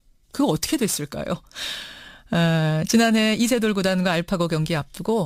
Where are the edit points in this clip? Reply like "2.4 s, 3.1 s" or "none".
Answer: none